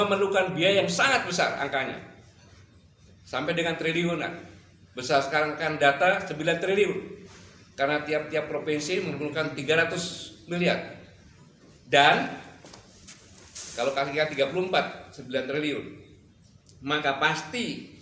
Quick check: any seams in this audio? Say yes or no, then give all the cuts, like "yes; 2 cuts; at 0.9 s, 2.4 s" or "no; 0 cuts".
no; 0 cuts